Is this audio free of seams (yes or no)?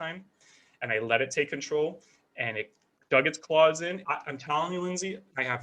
no